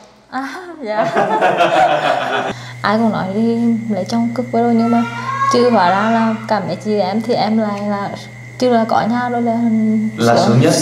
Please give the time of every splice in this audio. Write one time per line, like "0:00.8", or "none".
0:02.5